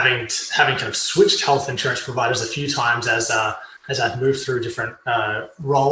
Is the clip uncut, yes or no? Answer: yes